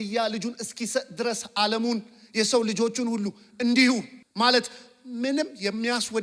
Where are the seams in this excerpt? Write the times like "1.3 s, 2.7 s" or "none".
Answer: 4.2 s